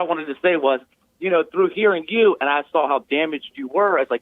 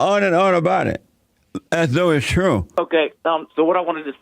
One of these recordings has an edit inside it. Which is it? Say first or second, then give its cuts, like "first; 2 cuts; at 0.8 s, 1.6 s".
second; 1 cut; at 2.8 s